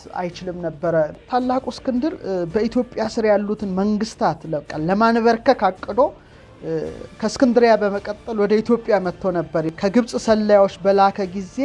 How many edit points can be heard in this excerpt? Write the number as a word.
two